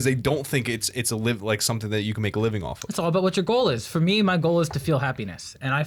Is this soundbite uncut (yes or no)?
yes